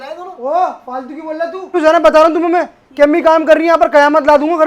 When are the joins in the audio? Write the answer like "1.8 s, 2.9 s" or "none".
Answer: 1.7 s